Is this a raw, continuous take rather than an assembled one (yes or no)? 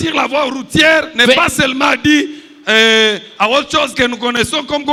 yes